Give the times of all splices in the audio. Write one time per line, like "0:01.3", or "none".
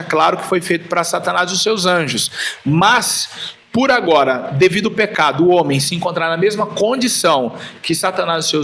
none